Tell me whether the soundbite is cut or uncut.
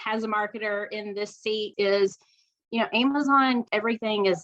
cut